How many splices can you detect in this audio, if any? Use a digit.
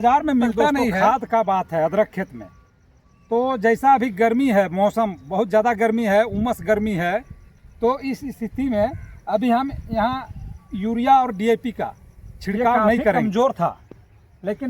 2